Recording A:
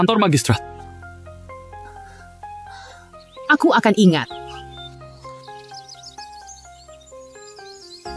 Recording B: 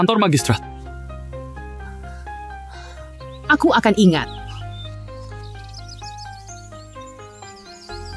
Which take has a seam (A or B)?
B